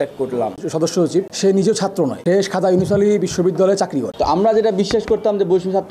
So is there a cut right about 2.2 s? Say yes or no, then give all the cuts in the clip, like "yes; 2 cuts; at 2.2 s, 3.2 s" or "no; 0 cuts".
yes; 3 cuts; at 1.3 s, 2.2 s, 4.1 s